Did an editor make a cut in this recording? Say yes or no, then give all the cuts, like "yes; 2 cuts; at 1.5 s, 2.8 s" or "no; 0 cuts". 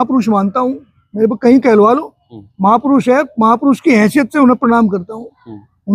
no; 0 cuts